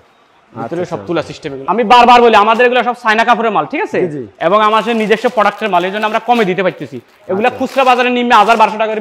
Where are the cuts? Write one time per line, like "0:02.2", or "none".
0:01.6